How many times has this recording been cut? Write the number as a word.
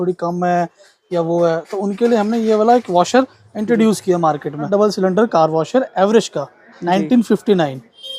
one